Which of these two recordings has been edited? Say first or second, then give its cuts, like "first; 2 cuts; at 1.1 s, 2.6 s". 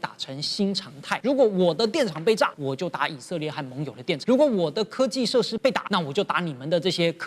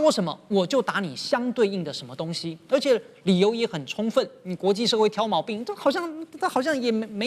first; 4 cuts; at 1.2 s, 2.6 s, 4.2 s, 5.6 s